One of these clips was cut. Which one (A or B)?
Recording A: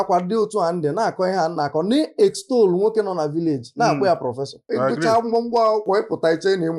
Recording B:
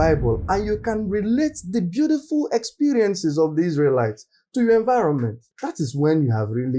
A